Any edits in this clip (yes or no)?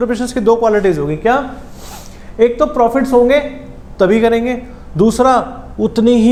no